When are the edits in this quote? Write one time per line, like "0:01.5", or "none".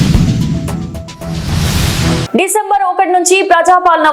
0:02.2